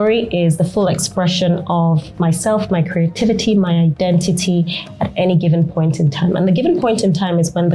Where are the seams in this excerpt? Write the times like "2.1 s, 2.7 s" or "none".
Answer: none